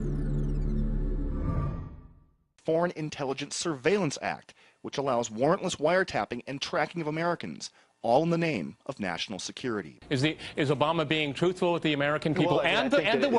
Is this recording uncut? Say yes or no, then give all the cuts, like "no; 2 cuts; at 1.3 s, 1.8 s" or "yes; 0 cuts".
no; 1 cut; at 4.4 s